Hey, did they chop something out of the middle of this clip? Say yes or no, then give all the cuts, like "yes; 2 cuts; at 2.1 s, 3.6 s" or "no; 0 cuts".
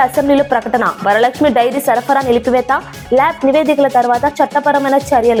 no; 0 cuts